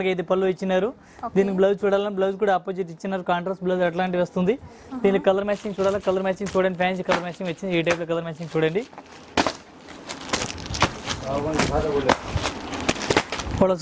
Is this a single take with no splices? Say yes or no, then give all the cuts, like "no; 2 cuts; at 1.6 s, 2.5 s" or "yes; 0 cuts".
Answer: yes; 0 cuts